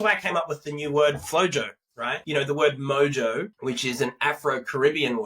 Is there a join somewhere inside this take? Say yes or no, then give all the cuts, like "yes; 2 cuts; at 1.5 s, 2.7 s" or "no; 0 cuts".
yes; 2 cuts; at 2.1 s, 3.5 s